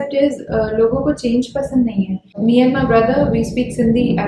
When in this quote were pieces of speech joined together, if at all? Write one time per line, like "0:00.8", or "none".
0:02.4

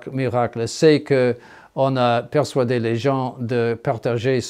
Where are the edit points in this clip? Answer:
none

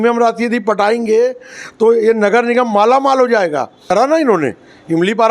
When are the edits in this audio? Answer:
0:03.9

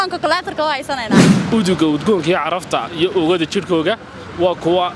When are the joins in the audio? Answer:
0:01.3

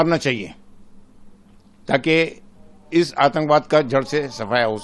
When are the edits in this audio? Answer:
none

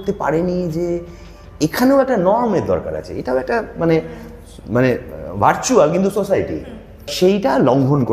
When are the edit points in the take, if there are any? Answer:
0:07.1

